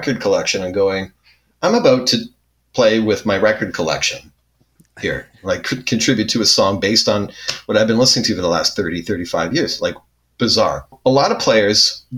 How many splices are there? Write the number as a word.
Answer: one